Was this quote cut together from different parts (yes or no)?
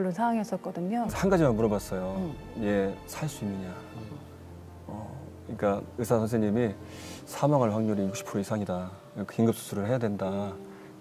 yes